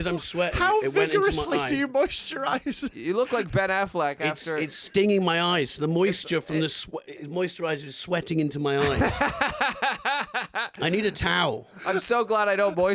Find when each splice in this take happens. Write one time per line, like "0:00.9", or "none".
none